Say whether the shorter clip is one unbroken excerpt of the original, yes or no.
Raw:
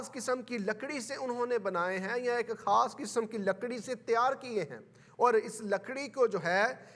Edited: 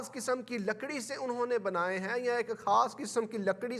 yes